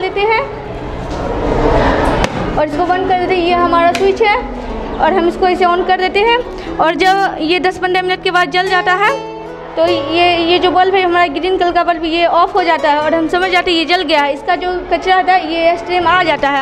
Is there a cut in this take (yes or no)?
no